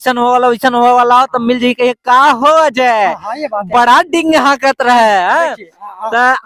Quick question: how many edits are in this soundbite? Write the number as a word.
zero